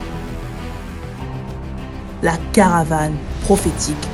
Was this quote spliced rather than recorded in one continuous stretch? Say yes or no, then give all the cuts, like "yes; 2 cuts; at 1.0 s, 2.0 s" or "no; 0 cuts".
yes; 1 cut; at 2.2 s